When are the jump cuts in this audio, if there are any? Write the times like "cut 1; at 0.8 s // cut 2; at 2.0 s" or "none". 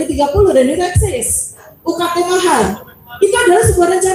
cut 1; at 1.7 s